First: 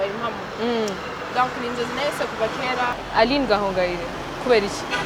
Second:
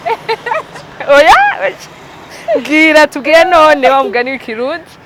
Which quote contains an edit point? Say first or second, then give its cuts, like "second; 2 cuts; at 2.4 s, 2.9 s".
first; 1 cut; at 2.9 s